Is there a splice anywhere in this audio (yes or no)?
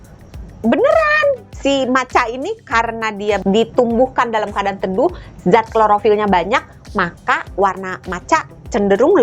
yes